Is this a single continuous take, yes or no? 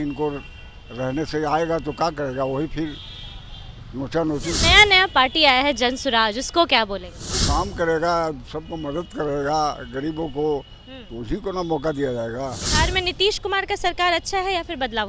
no